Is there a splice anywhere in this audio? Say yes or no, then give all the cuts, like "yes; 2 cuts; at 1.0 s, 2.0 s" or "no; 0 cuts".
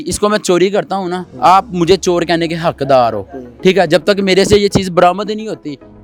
no; 0 cuts